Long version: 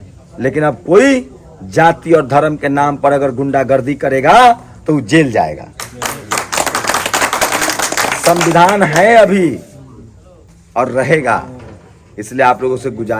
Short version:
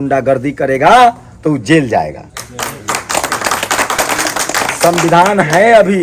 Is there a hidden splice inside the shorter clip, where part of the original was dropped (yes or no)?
no